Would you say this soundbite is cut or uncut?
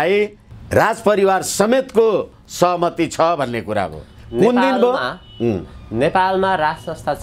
uncut